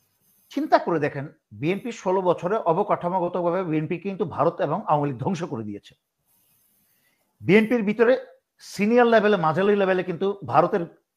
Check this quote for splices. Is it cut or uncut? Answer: uncut